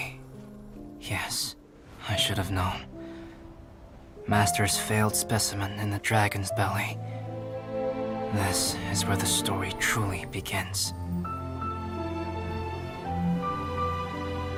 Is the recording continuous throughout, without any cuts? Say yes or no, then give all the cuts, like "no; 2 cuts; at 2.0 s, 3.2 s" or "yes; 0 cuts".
yes; 0 cuts